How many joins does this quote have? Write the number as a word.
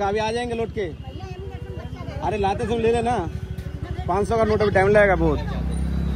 zero